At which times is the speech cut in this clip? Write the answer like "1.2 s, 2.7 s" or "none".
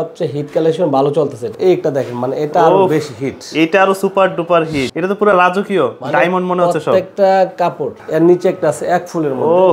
1.5 s, 4.9 s, 8.0 s